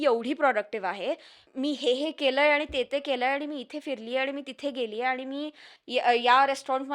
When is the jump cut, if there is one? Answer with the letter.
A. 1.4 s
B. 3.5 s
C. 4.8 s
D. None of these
A